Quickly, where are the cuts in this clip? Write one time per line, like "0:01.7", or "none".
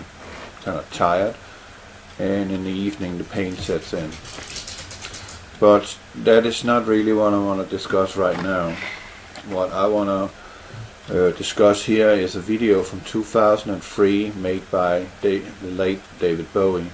none